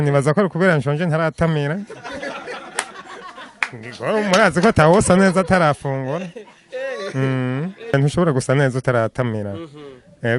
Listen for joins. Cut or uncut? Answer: cut